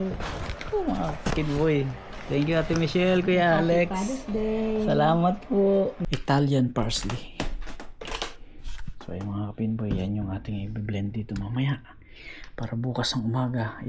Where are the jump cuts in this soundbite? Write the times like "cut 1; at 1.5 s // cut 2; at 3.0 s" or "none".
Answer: cut 1; at 6.1 s